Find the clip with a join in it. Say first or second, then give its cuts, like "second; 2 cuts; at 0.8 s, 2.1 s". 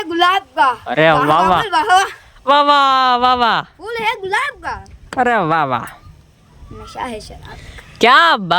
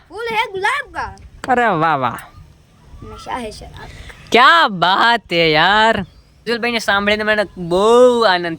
second; 1 cut; at 6.4 s